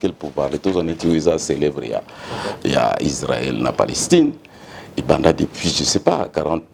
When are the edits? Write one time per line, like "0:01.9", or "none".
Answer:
none